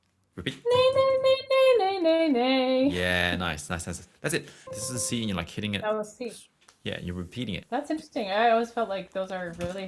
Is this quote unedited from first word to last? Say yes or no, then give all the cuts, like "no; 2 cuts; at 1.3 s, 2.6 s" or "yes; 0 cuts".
no; 2 cuts; at 4.7 s, 7.6 s